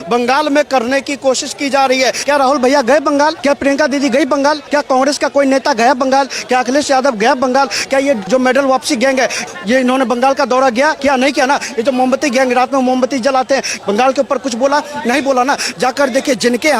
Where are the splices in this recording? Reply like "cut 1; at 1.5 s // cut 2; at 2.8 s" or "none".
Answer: cut 1; at 2.2 s // cut 2; at 3.4 s // cut 3; at 4.6 s // cut 4; at 8.2 s // cut 5; at 9.5 s // cut 6; at 11.0 s // cut 7; at 13.7 s

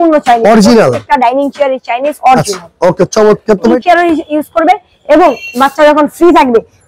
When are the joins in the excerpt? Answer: cut 1; at 3.8 s

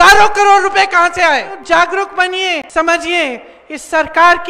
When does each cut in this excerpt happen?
cut 1; at 1.6 s // cut 2; at 2.7 s

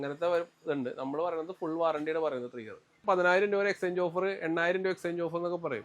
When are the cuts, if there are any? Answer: cut 1; at 3.0 s

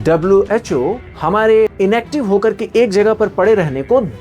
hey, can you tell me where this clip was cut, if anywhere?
cut 1; at 1.1 s // cut 2; at 1.7 s

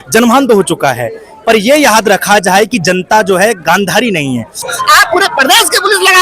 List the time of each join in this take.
cut 1; at 4.7 s

